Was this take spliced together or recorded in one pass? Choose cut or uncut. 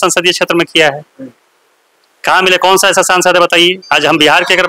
uncut